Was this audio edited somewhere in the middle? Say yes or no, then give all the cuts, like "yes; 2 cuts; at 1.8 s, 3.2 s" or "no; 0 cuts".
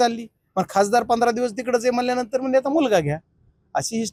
no; 0 cuts